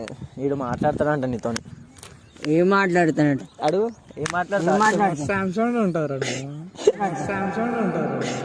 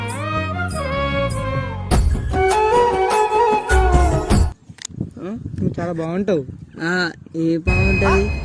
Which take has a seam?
second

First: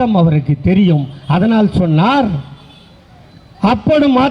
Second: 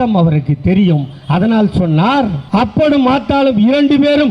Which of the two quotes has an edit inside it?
second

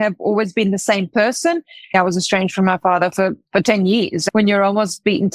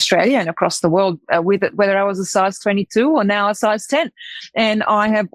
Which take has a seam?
first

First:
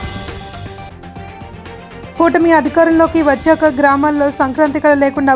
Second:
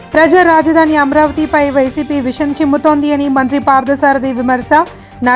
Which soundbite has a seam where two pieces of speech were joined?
first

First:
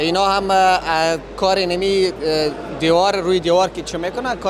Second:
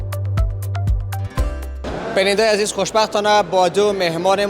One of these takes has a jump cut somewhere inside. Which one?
second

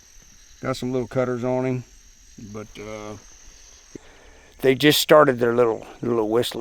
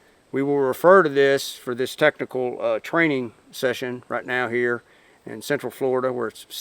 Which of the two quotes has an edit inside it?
first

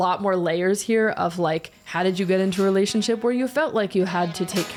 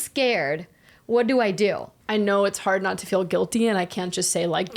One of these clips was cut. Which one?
second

